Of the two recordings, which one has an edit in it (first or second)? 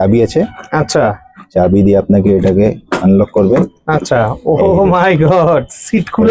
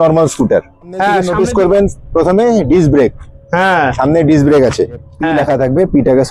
second